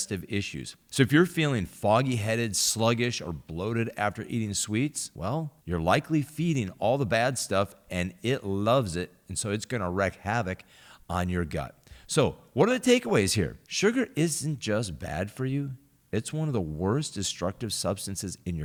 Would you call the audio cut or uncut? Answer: uncut